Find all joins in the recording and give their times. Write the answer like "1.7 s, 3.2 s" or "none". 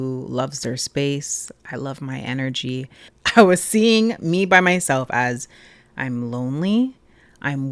3.1 s